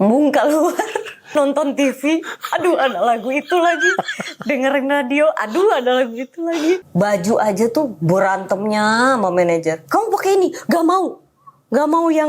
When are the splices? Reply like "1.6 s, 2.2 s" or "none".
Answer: 1.2 s, 6.8 s